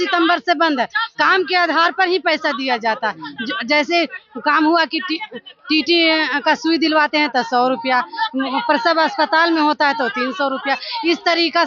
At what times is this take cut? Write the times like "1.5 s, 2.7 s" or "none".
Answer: none

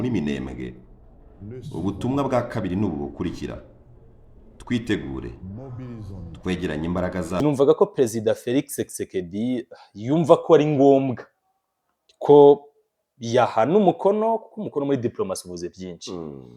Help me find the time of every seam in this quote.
7.4 s

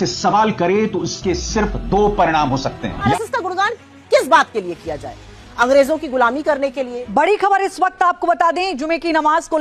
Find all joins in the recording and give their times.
3.1 s, 7.0 s

